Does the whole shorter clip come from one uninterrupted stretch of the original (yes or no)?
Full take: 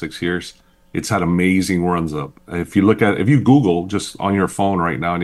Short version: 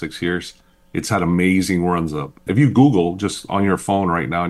no